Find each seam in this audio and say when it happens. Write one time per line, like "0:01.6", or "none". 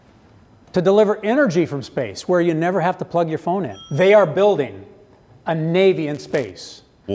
0:03.8